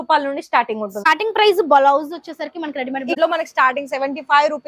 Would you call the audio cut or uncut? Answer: cut